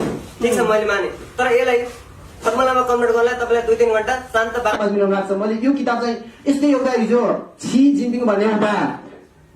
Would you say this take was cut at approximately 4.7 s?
yes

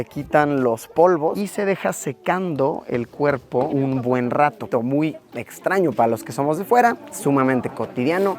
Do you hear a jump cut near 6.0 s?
no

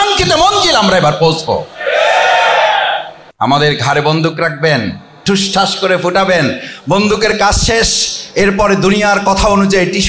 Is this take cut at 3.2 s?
yes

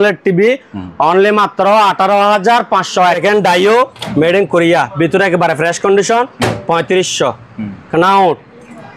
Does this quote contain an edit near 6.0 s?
no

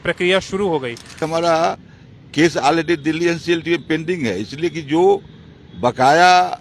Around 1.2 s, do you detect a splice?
yes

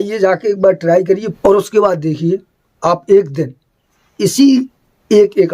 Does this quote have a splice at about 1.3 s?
yes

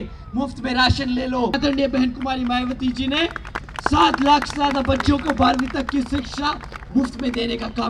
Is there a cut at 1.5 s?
yes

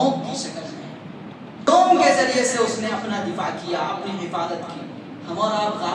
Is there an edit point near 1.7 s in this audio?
yes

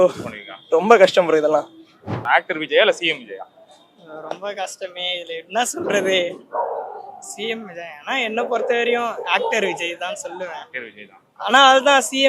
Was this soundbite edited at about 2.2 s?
yes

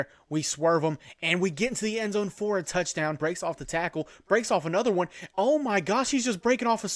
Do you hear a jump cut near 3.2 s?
yes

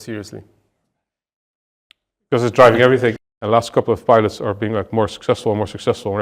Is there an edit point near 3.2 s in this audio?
yes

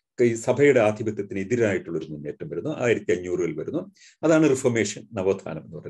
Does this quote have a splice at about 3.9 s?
no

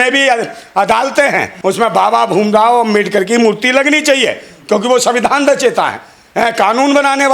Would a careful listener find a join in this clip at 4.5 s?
no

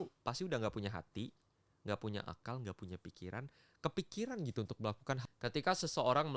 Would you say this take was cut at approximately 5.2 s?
yes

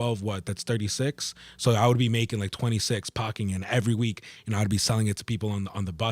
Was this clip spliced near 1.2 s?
no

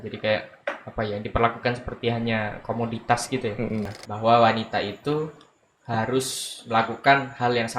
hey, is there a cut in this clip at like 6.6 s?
no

